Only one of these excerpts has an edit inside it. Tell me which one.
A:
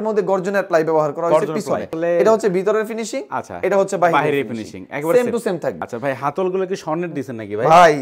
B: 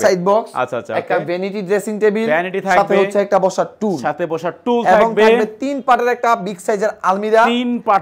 A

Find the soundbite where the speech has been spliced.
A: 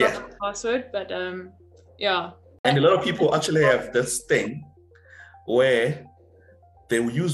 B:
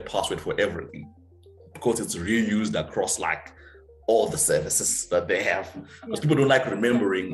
A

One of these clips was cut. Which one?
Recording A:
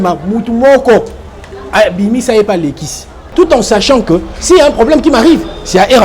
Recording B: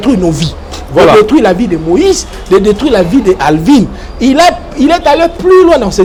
A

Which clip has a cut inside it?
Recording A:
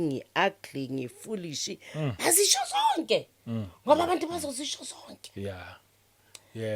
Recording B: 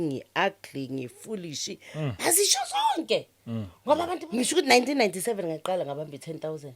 B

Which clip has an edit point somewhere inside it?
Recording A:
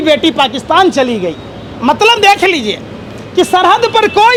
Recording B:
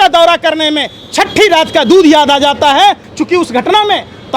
B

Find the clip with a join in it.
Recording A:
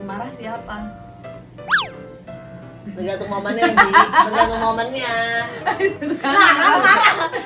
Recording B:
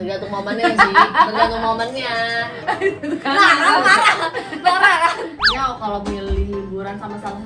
B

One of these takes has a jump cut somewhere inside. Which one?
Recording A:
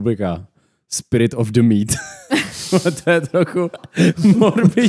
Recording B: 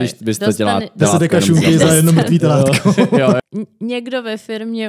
B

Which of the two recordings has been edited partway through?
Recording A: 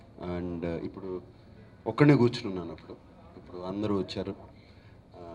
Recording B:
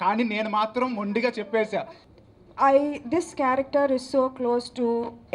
B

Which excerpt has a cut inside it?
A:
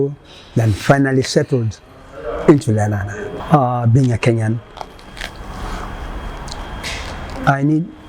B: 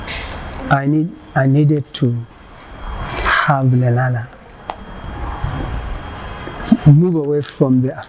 A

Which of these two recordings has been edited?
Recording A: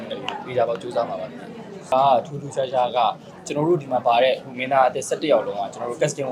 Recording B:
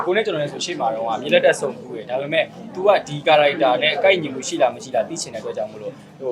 A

